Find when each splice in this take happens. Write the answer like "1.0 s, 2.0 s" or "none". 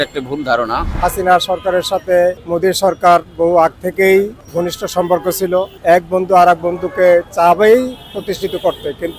0.9 s, 2.4 s, 4.4 s, 5.7 s